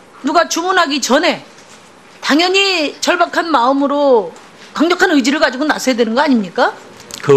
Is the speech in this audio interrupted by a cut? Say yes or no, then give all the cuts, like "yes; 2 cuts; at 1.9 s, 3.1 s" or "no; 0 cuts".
no; 0 cuts